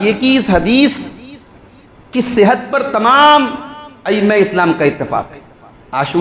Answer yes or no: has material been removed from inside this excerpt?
no